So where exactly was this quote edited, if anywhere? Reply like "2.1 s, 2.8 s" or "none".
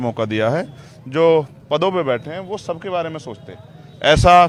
none